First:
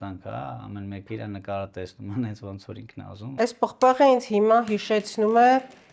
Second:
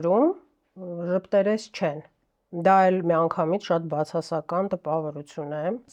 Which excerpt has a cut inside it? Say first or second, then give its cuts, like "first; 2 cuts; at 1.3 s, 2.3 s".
first; 1 cut; at 3.3 s